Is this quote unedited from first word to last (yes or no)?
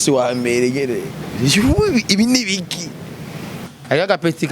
no